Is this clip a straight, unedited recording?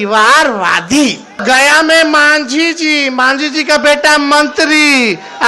no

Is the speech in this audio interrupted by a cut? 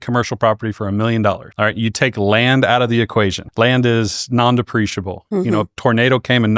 yes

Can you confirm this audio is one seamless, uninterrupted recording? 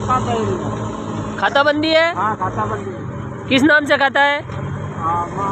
yes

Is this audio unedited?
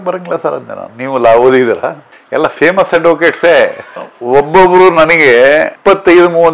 no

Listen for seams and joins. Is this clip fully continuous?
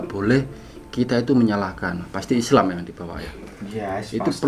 no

